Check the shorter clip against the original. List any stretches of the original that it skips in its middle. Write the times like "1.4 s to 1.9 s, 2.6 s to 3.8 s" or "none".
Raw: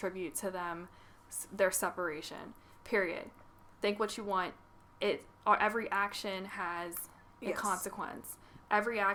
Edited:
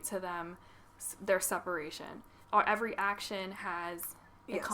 2.7 s to 5.3 s